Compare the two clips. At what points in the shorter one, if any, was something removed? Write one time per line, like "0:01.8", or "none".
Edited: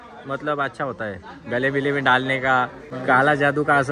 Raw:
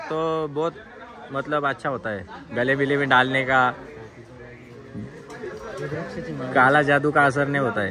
0:02.9